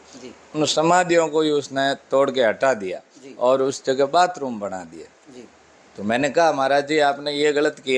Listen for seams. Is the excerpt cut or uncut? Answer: uncut